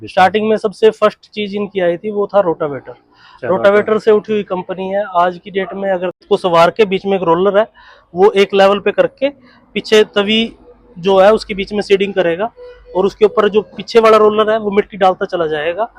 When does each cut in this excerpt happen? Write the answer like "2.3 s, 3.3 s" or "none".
6.2 s